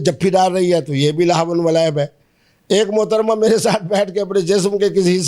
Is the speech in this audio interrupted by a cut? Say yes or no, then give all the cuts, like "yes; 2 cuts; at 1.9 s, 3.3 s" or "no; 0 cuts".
no; 0 cuts